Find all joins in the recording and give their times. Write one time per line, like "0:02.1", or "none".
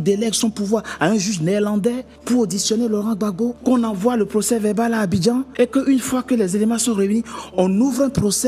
0:02.1
0:03.6
0:05.5